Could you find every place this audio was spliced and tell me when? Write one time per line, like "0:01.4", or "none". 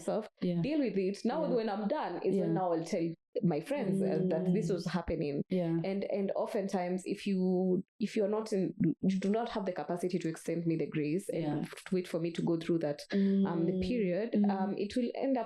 none